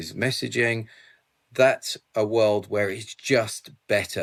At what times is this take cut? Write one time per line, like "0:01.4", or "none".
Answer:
none